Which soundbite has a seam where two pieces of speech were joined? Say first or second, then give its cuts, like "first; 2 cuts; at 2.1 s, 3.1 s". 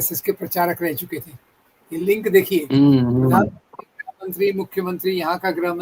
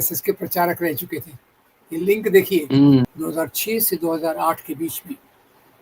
second; 1 cut; at 3.1 s